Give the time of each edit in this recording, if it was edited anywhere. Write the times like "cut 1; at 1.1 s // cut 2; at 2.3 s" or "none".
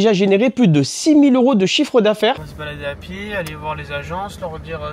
cut 1; at 2.3 s